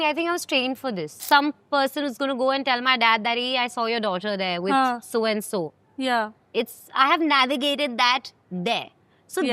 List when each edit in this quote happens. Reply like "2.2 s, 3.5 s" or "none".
1.1 s